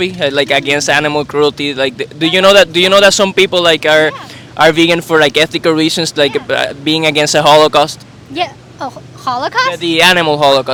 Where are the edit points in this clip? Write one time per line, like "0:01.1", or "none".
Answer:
none